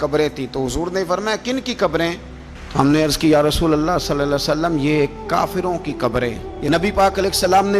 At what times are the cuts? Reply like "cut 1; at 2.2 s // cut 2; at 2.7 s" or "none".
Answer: cut 1; at 6.5 s